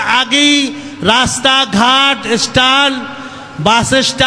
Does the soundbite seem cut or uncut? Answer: uncut